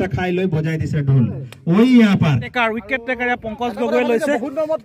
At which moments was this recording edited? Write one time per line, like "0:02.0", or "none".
0:02.5